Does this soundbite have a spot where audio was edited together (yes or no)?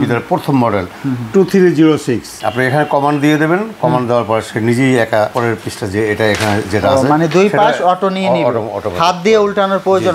yes